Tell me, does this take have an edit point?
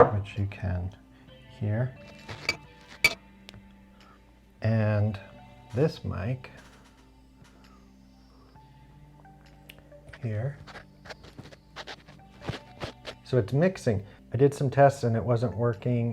yes; 1 cut; at 14.2 s

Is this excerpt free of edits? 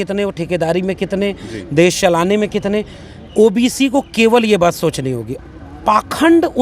no; 1 cut; at 5.3 s

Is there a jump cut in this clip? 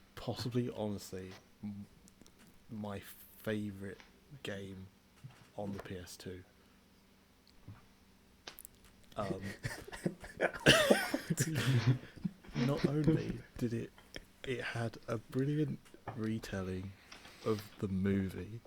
no; 0 cuts

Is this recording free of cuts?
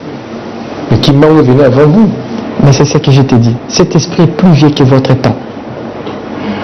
yes; 0 cuts

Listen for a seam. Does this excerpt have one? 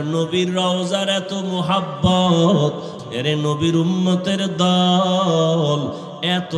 yes; 1 cut; at 2.9 s

